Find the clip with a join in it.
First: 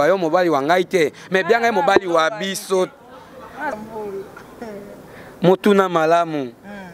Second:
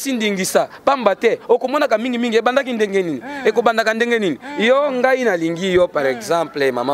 first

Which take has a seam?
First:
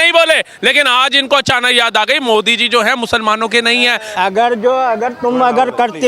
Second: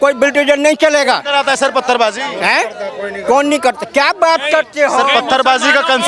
first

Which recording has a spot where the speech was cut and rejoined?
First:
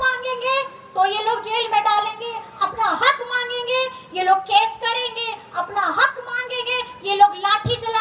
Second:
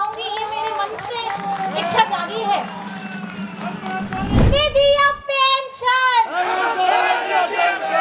second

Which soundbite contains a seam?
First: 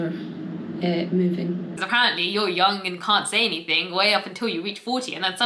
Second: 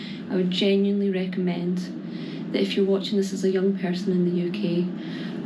first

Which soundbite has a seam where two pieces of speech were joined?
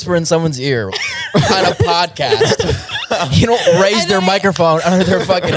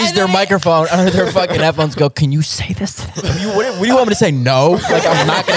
second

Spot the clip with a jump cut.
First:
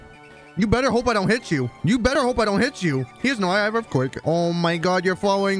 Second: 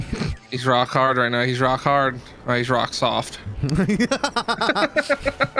first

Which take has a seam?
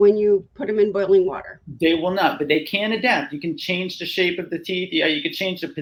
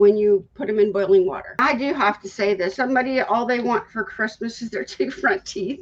second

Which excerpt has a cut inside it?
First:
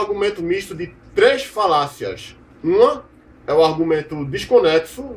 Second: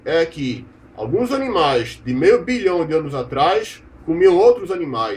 second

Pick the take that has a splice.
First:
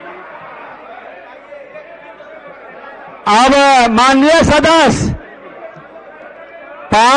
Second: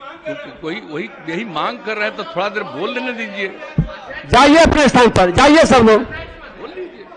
first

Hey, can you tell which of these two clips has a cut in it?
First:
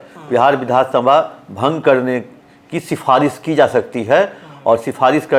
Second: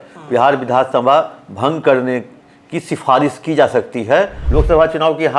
second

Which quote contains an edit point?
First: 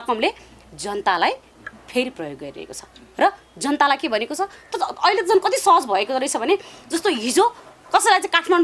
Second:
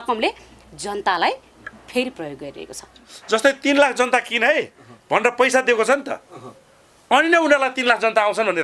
second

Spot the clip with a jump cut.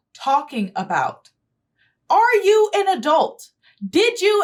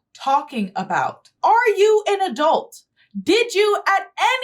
second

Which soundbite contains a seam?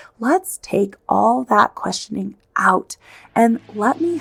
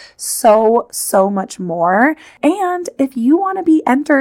second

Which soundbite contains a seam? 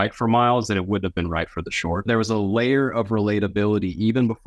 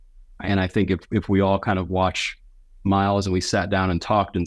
first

